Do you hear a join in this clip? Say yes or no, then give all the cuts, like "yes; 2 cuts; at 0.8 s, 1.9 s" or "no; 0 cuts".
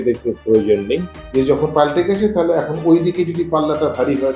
yes; 1 cut; at 1.2 s